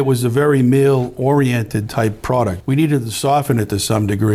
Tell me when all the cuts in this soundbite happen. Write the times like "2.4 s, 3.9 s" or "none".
2.6 s